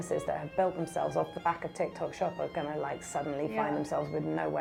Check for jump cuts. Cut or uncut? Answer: uncut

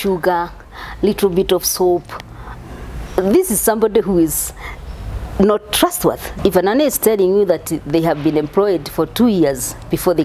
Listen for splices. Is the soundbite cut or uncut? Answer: cut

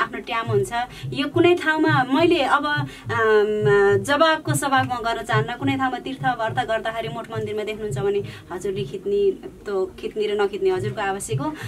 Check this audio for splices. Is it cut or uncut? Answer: uncut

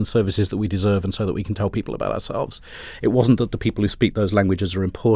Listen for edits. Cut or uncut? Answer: uncut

